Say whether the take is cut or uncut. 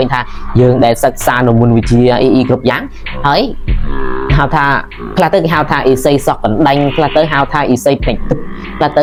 uncut